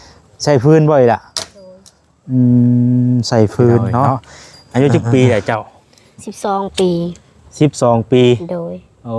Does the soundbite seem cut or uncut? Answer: cut